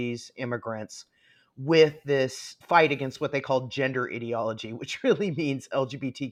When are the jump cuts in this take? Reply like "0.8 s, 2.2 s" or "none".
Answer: none